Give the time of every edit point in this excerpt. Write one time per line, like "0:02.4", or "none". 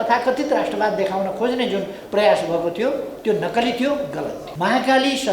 0:04.4